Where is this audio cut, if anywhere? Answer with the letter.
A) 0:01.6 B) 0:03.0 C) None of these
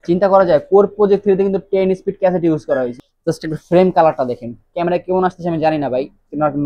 B